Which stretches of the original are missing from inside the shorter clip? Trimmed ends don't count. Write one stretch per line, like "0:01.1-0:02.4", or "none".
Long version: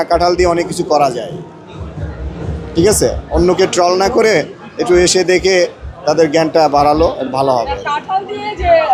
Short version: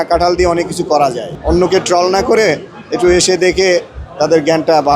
0:01.4-0:03.2